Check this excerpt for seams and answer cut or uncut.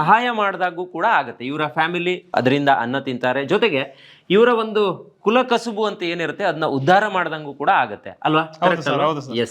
uncut